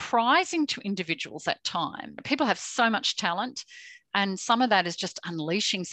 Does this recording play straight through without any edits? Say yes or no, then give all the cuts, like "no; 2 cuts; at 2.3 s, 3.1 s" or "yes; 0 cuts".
no; 1 cut; at 2.1 s